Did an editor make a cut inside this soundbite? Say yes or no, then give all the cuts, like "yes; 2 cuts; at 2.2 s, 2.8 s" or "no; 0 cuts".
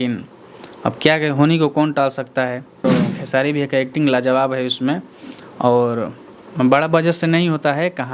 yes; 1 cut; at 2.8 s